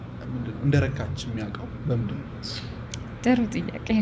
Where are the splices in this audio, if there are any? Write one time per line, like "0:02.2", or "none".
none